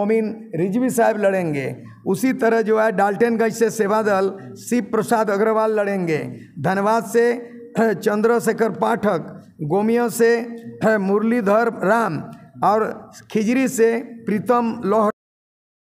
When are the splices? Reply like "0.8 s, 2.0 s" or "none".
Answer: none